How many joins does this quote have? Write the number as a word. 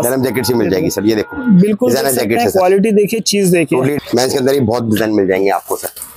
one